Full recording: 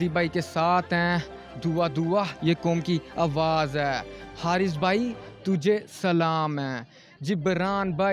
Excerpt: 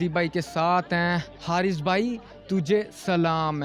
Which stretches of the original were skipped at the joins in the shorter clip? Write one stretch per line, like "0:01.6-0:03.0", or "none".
0:01.3-0:04.3